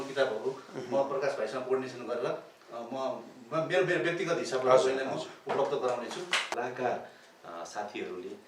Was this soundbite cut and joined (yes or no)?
yes